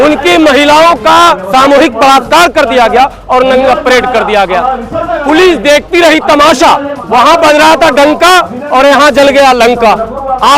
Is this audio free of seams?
no; 2 cuts; at 1.5 s, 7.0 s

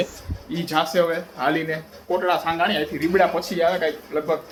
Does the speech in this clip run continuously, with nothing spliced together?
yes; 0 cuts

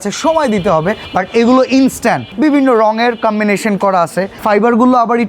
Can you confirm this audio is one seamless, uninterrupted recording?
no; 3 cuts; at 1.0 s, 2.3 s, 4.4 s

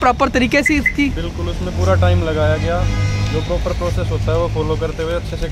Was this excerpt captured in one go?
yes; 0 cuts

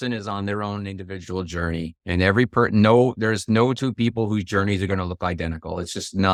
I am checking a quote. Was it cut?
no; 0 cuts

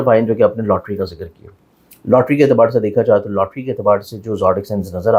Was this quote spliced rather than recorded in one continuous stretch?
no; 0 cuts

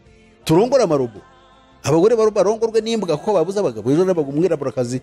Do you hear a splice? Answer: no; 0 cuts

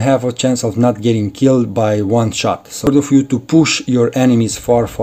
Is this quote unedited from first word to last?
no; 1 cut; at 2.9 s

